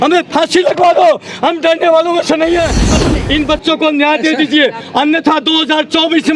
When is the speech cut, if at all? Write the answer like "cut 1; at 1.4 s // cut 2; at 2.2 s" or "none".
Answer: cut 1; at 2.9 s